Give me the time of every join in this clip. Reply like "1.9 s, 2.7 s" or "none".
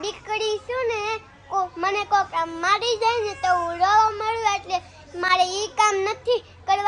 none